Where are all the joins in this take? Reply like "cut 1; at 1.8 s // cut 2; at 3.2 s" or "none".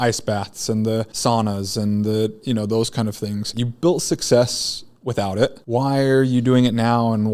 cut 1; at 1.1 s // cut 2; at 3.6 s // cut 3; at 5.6 s